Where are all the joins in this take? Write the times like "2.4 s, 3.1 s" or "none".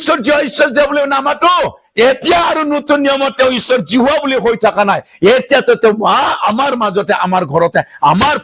none